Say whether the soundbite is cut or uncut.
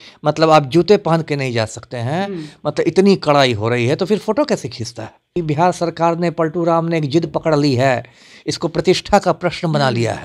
cut